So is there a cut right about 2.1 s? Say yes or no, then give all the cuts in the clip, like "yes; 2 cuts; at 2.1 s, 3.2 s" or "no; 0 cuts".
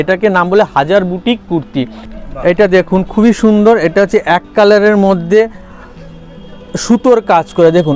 yes; 1 cut; at 2.1 s